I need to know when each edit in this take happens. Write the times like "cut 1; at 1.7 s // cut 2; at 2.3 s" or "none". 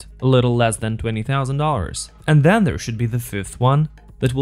none

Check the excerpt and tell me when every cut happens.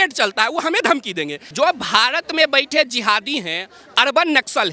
cut 1; at 1.4 s

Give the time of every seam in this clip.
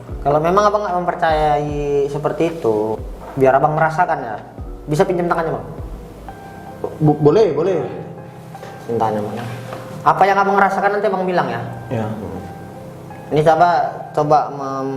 cut 1; at 3.0 s

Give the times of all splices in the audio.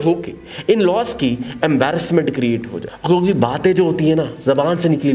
none

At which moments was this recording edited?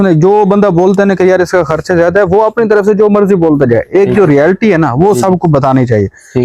none

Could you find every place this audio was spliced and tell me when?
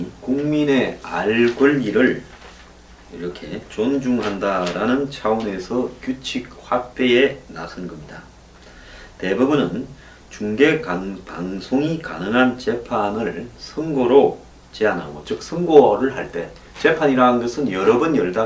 none

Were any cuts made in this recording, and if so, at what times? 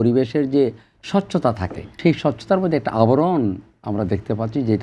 cut 1; at 2.0 s

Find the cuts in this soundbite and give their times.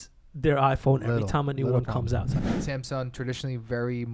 cut 1; at 2.3 s

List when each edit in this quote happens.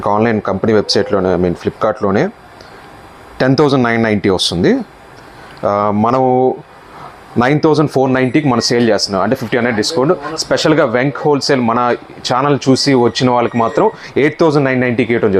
none

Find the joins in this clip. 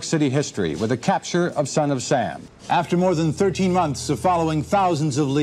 none

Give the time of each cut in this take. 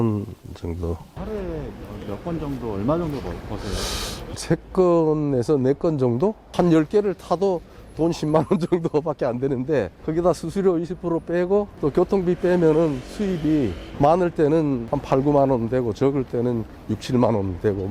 cut 1; at 1.1 s // cut 2; at 6.4 s // cut 3; at 10.0 s // cut 4; at 11.7 s // cut 5; at 13.8 s // cut 6; at 14.9 s

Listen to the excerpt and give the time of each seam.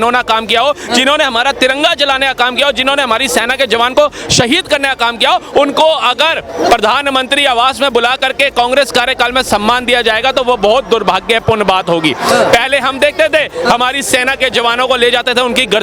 none

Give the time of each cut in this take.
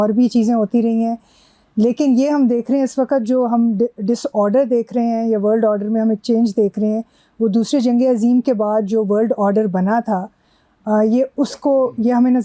none

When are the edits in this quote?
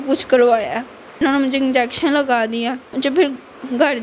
cut 1; at 1.2 s // cut 2; at 3.0 s

